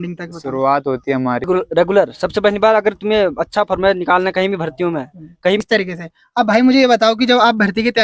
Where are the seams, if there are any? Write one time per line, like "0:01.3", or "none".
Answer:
0:01.5
0:05.6